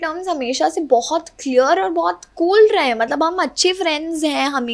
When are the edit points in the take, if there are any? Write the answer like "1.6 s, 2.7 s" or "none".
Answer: none